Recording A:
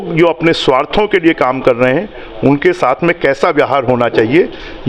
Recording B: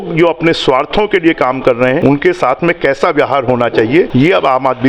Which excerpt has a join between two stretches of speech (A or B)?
B